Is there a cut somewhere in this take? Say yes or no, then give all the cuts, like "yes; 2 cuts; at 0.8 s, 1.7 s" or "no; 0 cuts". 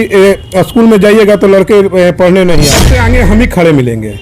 yes; 1 cut; at 2.9 s